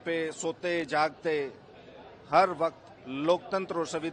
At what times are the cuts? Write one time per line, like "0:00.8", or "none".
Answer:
none